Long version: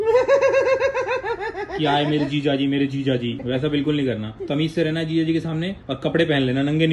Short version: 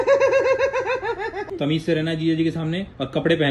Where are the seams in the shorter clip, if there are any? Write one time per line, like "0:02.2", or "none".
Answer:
0:01.4